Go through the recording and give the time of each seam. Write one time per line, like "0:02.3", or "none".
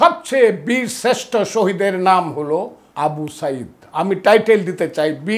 0:02.8